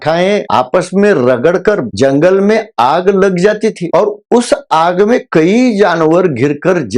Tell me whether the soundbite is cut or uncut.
uncut